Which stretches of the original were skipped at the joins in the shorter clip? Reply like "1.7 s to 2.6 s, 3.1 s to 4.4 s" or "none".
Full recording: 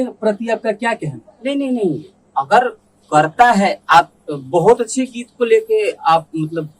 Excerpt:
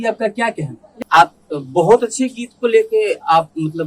1.4 s to 3.8 s